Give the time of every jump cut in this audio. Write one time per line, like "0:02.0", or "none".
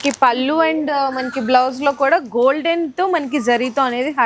none